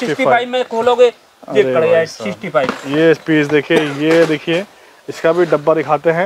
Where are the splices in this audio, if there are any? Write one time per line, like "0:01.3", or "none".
none